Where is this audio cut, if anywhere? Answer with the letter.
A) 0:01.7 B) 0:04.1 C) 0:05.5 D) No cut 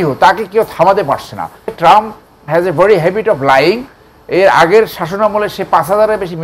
A